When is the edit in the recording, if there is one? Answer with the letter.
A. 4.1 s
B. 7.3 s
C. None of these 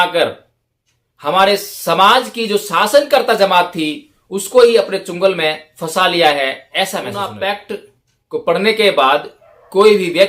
B